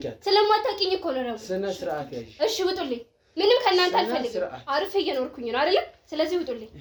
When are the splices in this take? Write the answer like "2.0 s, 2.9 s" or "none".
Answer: none